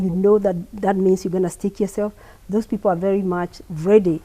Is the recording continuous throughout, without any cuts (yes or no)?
yes